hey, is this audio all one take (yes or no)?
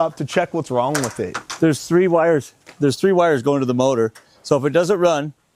yes